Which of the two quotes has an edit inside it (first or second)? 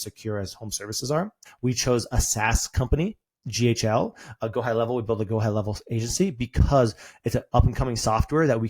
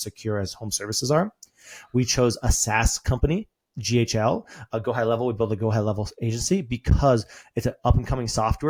first